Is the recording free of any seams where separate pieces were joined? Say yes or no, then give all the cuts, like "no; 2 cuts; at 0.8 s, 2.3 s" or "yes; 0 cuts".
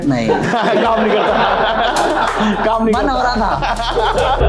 yes; 0 cuts